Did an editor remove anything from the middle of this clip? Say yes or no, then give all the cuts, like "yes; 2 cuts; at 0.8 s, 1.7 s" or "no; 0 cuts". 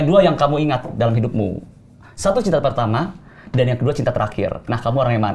no; 0 cuts